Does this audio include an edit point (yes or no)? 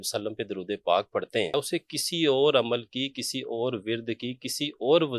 yes